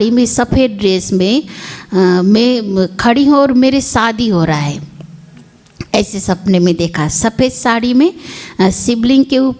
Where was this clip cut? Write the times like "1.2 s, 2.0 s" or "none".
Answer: none